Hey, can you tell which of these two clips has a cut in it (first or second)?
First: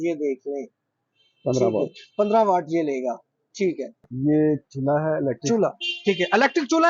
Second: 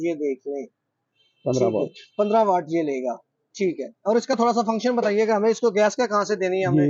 first